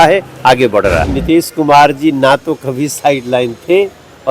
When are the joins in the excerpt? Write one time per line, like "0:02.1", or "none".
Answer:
0:01.1